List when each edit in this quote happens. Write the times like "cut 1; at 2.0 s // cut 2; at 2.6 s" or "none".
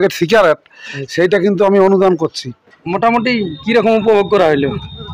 cut 1; at 2.8 s